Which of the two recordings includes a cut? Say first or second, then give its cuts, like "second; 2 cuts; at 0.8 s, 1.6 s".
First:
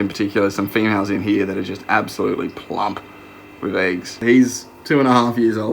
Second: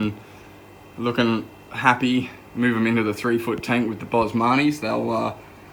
first; 1 cut; at 4.2 s